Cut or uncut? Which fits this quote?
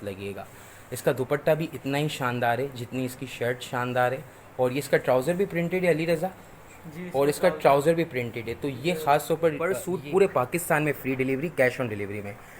cut